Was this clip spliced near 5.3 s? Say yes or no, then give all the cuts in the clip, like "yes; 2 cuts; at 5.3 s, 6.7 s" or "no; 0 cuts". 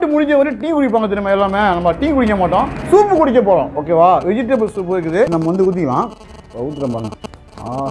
yes; 1 cut; at 5.3 s